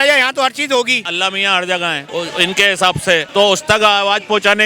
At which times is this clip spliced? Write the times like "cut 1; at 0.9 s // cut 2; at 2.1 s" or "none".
cut 1; at 1.1 s // cut 2; at 2.0 s